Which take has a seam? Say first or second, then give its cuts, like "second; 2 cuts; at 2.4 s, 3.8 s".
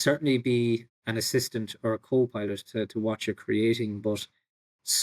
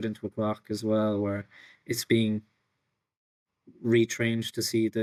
first; 1 cut; at 1.0 s